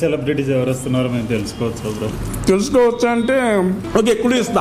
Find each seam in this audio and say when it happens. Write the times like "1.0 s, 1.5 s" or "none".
2.1 s, 3.8 s